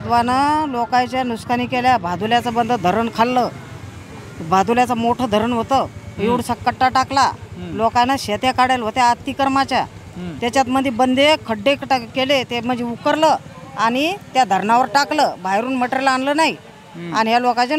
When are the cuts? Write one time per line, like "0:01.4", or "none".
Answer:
none